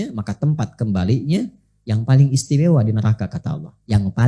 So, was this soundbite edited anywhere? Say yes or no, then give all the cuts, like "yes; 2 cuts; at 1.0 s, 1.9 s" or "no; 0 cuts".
no; 0 cuts